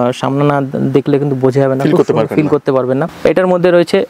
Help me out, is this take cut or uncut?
cut